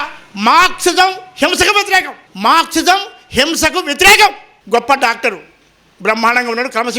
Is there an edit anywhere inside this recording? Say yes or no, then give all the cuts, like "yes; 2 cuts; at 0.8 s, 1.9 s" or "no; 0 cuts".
yes; 2 cuts; at 2.2 s, 4.5 s